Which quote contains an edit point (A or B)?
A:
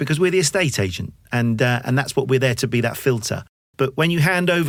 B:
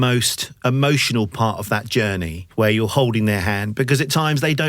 B